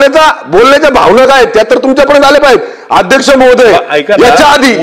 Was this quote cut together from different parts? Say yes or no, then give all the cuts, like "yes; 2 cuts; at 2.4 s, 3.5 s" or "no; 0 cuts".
no; 0 cuts